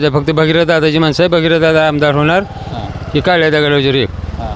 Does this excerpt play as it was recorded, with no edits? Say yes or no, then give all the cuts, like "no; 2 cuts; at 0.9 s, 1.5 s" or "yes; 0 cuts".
yes; 0 cuts